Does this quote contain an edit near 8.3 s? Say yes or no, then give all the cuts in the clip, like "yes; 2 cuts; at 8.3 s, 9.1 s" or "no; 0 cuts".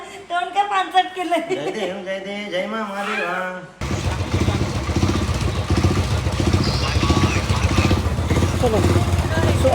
no; 1 cut; at 3.8 s